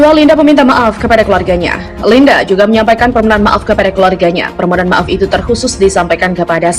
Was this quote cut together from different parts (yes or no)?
no